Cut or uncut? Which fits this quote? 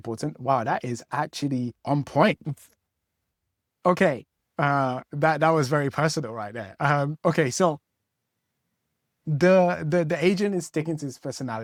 uncut